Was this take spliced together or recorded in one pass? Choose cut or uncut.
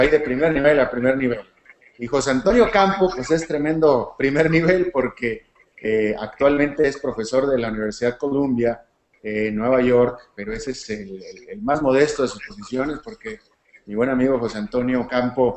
cut